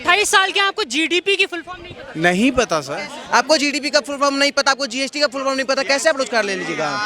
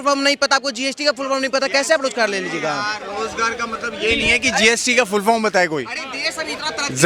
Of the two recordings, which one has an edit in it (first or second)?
first